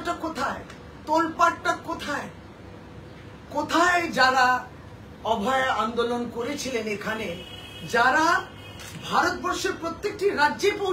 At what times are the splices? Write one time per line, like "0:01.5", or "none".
none